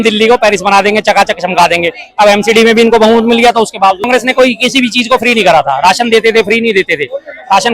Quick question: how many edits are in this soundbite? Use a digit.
1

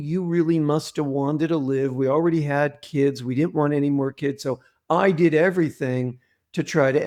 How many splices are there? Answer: 0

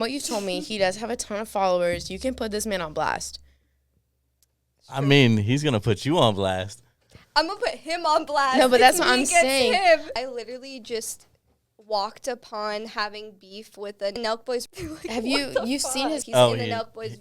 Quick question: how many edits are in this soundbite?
2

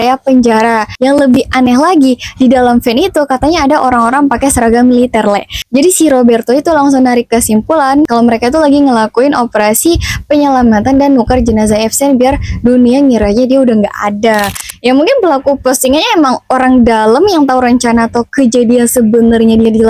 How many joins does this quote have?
1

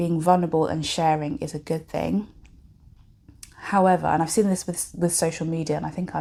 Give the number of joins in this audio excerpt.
0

